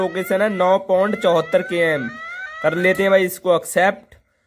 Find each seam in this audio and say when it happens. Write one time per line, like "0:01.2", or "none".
none